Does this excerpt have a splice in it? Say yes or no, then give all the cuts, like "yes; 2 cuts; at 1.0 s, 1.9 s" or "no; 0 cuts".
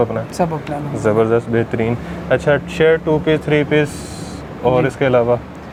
no; 0 cuts